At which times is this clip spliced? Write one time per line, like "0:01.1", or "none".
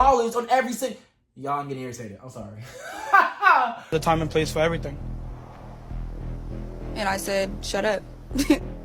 none